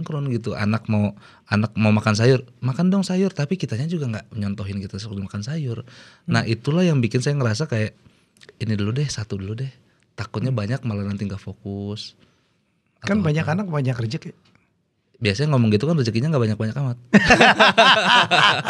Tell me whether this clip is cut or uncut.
uncut